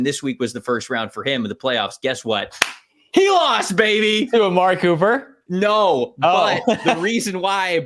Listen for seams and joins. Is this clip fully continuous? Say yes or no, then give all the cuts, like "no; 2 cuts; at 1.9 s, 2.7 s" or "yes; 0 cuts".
yes; 0 cuts